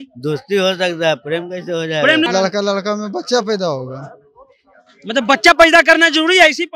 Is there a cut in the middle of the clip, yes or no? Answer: yes